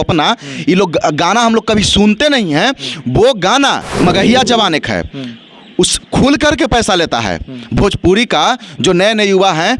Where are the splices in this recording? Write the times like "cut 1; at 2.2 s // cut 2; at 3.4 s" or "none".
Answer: cut 1; at 3.9 s